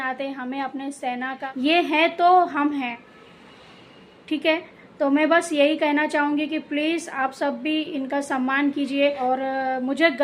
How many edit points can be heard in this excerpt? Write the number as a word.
two